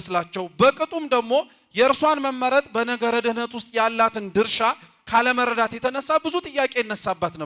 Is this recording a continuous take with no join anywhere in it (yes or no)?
yes